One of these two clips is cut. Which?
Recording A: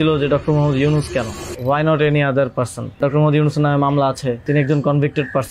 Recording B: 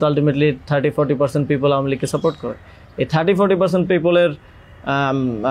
A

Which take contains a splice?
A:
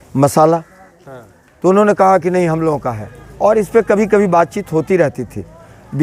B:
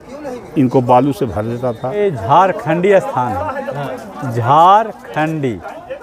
B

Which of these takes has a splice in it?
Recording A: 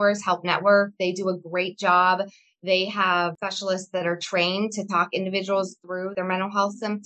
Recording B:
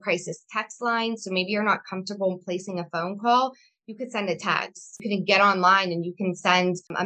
A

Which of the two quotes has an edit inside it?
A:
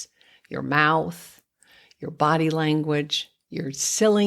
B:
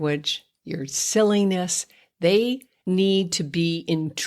B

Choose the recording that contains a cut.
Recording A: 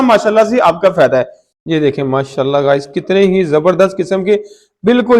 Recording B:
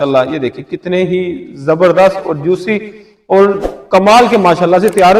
A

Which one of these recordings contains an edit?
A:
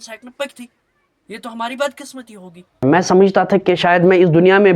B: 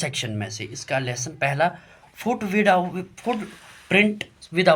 A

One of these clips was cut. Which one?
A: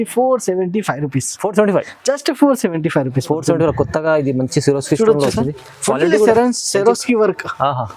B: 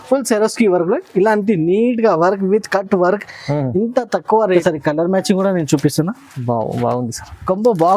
B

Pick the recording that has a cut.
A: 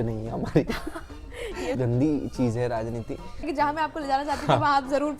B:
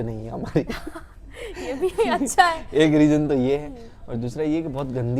A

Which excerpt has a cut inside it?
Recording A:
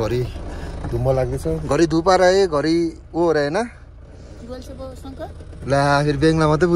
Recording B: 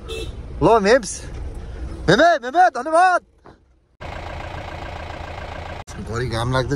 B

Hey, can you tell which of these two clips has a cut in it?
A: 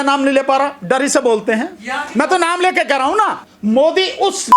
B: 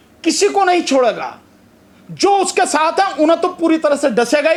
A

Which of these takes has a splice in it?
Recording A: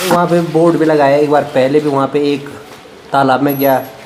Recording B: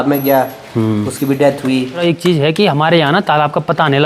B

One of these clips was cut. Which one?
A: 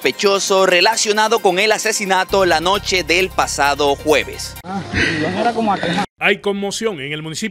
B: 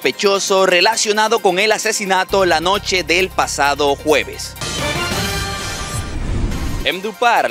B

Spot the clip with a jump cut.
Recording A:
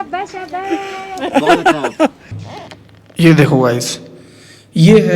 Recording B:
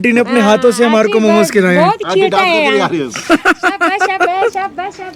A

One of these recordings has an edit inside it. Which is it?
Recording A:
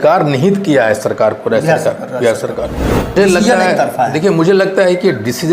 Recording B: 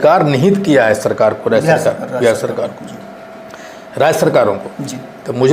A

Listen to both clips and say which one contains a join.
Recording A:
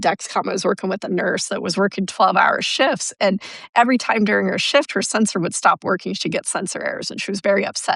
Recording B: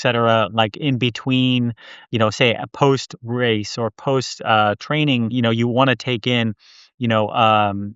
B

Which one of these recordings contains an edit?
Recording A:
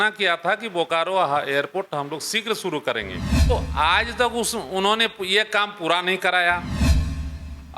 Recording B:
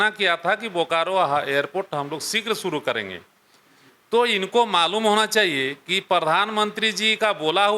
A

